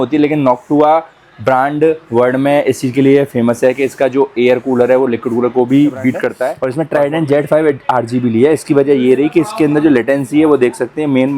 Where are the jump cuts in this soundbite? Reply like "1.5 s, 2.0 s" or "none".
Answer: 6.6 s